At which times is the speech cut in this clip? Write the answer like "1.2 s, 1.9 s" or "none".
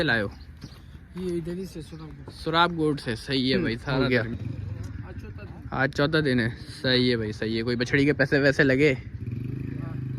3.8 s

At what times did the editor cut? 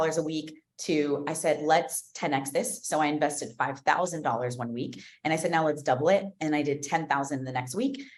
none

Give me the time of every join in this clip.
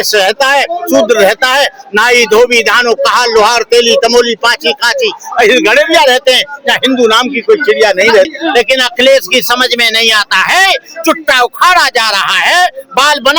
8.3 s

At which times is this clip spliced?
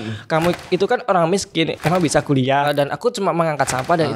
1.7 s, 2.7 s

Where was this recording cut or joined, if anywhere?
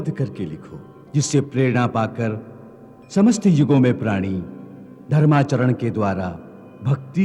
none

